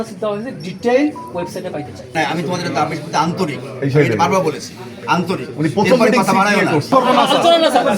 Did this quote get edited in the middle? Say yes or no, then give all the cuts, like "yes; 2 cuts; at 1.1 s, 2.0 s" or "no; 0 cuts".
yes; 2 cuts; at 2.1 s, 6.9 s